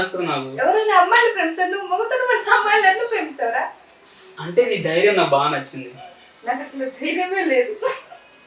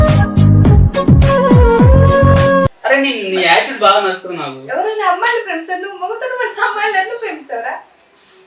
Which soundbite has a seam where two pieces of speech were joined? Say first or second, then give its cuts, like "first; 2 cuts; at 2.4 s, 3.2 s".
second; 1 cut; at 2.8 s